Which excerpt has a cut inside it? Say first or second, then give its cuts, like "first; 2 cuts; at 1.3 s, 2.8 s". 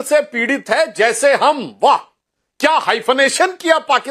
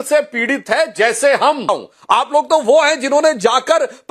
second; 1 cut; at 1.7 s